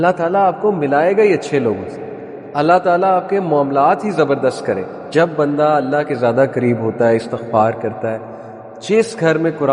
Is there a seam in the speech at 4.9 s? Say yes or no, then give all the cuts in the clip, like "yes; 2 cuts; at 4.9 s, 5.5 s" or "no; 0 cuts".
yes; 1 cut; at 4.9 s